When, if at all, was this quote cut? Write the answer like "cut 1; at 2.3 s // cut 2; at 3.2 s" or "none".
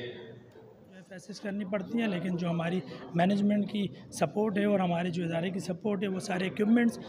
cut 1; at 1.3 s